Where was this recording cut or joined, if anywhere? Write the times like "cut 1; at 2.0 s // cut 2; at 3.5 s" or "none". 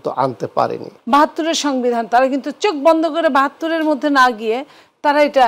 cut 1; at 0.9 s